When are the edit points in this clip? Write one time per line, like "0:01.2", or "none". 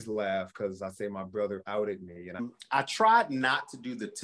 0:02.4

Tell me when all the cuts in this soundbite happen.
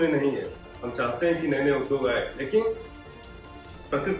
none

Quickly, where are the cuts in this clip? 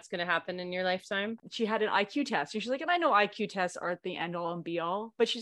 0:01.5

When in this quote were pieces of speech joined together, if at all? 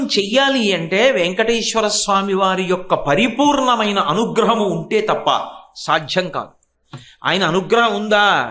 none

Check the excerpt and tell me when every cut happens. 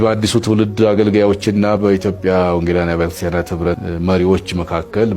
0:04.2

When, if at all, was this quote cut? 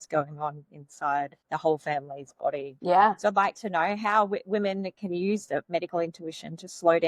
0:01.4
0:02.7

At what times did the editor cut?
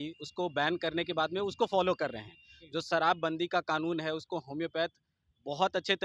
none

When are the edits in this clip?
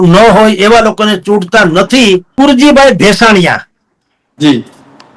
0:02.3

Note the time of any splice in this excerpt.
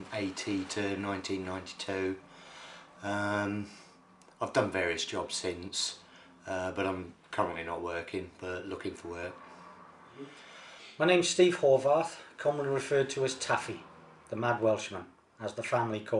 0:09.9

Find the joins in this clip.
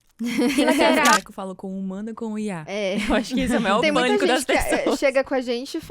0:01.2

